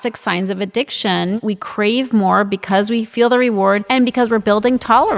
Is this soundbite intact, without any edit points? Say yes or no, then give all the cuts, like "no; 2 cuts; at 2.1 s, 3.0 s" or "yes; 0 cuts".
no; 1 cut; at 1.4 s